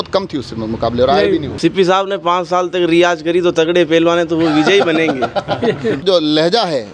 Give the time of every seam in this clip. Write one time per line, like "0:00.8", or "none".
0:01.5
0:06.0